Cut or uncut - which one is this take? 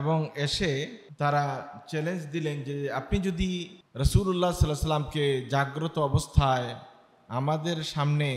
cut